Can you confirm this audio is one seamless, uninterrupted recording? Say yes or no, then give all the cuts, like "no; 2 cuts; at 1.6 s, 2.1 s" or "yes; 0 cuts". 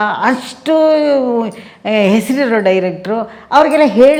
yes; 0 cuts